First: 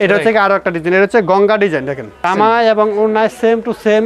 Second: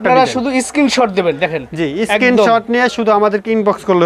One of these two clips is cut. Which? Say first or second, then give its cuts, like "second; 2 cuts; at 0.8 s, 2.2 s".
first; 1 cut; at 2.3 s